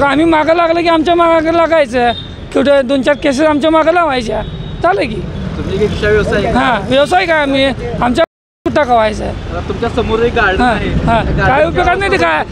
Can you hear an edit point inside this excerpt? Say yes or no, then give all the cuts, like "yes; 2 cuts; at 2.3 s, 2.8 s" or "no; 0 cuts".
no; 0 cuts